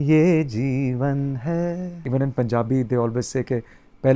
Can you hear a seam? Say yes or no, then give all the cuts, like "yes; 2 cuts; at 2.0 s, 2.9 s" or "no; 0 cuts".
yes; 1 cut; at 2.0 s